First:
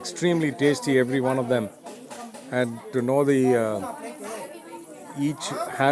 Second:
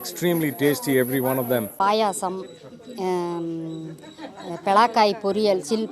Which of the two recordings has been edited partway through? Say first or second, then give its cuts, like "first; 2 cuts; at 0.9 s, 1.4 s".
second; 1 cut; at 1.8 s